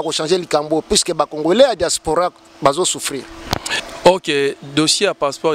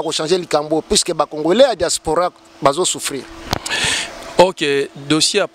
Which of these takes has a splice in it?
first; 1 cut; at 3.8 s

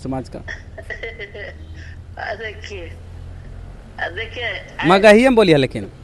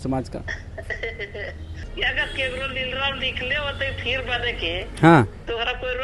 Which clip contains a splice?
second; 1 cut; at 1.8 s

